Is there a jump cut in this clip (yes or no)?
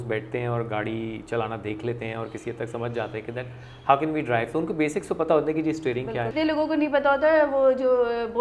yes